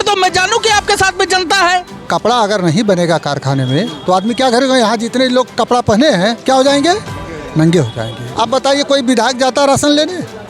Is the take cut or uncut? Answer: cut